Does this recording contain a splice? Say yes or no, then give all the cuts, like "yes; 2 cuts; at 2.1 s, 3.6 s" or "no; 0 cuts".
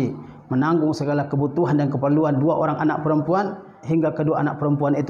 yes; 1 cut; at 3.8 s